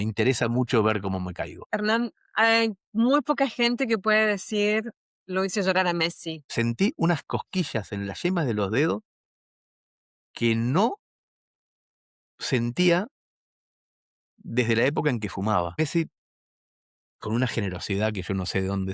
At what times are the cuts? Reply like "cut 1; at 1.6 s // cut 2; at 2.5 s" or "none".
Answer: cut 1; at 1.6 s // cut 2; at 6.4 s // cut 3; at 15.8 s